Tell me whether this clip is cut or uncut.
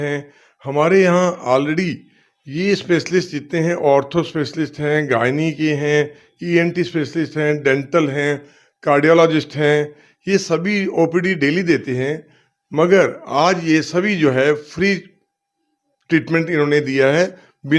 uncut